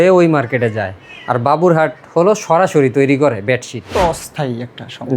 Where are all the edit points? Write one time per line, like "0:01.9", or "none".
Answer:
0:03.9

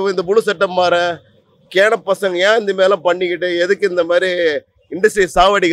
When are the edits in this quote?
none

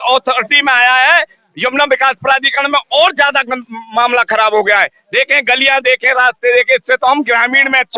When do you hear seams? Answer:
none

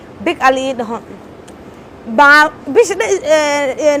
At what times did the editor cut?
none

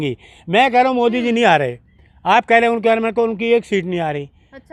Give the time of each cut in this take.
none

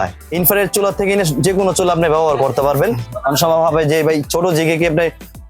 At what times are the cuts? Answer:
0:03.1

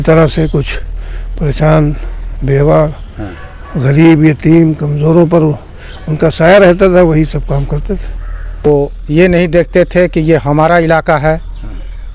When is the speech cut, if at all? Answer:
0:08.6

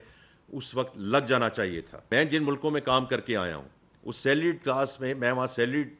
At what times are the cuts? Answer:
0:01.9

